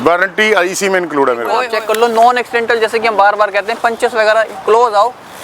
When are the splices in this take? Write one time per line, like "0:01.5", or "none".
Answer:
0:01.7